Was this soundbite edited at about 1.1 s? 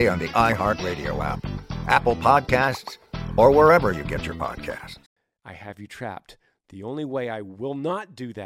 no; 1 cut; at 5.0 s

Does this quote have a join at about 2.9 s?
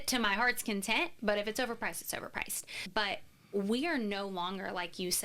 yes; 1 cut; at 2.9 s

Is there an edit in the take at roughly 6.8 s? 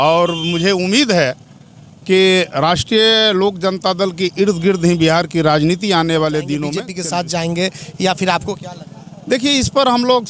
yes; 1 cut; at 6.8 s

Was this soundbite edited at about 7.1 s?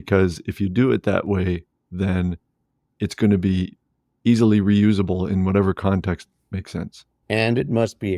yes; 1 cut; at 7.1 s

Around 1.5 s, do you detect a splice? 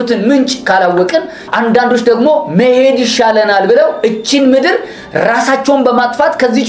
yes; 1 cut; at 1.5 s

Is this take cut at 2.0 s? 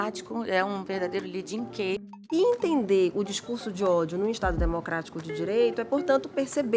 yes; 1 cut; at 2.0 s

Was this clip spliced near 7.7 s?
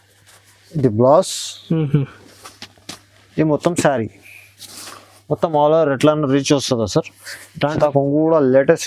yes; 1 cut; at 7.7 s

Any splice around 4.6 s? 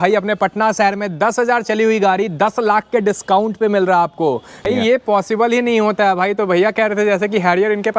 yes; 1 cut; at 4.6 s

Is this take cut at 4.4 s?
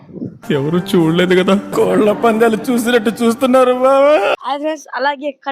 yes; 1 cut; at 4.4 s

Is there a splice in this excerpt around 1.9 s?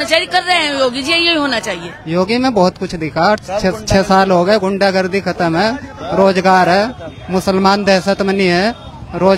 yes; 1 cut; at 1.9 s

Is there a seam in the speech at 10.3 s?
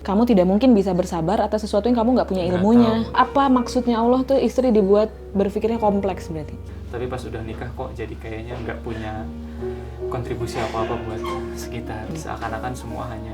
no; 3 cuts; at 3.2 s, 6.7 s, 12.1 s

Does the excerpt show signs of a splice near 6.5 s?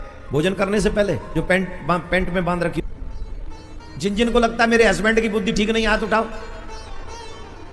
no; 1 cut; at 2.8 s

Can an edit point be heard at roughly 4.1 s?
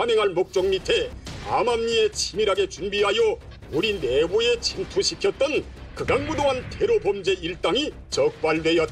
no; 1 cut; at 1.2 s

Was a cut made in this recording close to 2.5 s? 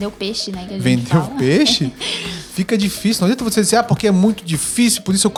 no; 0 cuts

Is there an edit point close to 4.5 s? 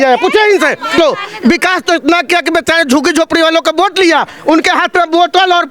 no; 1 cut; at 0.9 s

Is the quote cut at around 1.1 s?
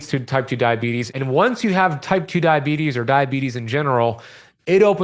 yes; 1 cut; at 1.1 s

